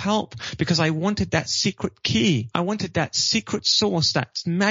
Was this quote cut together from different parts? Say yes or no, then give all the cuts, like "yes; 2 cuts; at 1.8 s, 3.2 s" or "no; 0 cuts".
yes; 1 cut; at 2.5 s